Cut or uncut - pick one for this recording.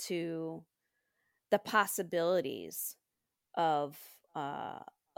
uncut